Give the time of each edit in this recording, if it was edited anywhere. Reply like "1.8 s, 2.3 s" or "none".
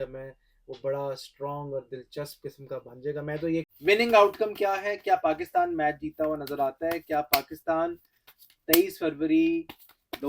3.7 s